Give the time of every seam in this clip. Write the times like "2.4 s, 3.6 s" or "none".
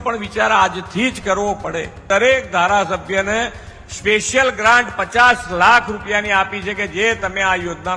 2.0 s